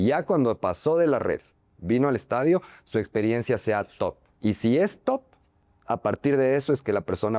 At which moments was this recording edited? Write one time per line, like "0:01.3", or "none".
0:04.3